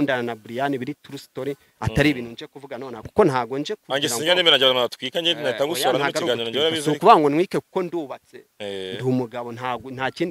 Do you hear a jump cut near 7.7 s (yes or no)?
no